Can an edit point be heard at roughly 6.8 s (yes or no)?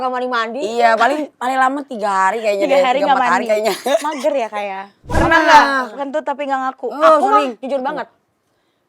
no